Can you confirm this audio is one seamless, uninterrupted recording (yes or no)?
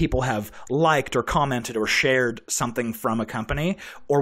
yes